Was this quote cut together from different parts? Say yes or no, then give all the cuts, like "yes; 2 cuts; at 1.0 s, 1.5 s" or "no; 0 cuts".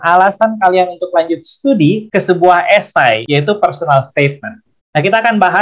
yes; 2 cuts; at 2.0 s, 3.2 s